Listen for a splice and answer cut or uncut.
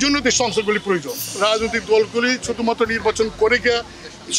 cut